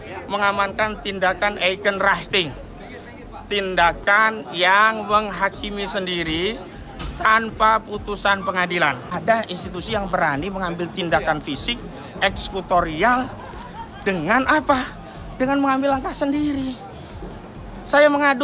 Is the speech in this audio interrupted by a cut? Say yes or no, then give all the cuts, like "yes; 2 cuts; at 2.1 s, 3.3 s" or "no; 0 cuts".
yes; 1 cut; at 9.0 s